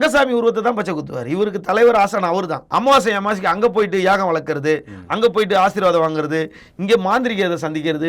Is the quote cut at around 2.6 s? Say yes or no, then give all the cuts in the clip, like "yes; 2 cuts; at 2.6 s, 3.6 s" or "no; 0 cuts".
yes; 1 cut; at 2.6 s